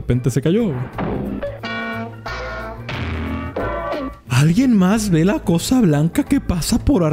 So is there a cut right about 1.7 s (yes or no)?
no